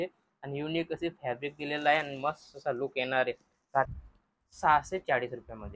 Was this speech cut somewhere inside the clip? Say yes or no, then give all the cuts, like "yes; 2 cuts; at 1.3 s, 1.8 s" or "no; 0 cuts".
yes; 1 cut; at 3.9 s